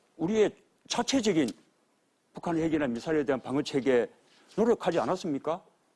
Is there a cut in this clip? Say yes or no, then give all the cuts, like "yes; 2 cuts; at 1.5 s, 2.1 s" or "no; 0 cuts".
no; 0 cuts